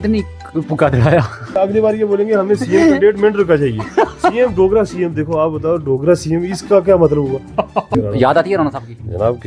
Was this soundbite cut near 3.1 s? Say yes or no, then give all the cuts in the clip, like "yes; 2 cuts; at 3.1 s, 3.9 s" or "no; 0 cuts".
no; 2 cuts; at 1.4 s, 7.9 s